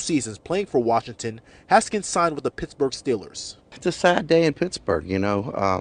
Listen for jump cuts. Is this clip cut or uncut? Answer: uncut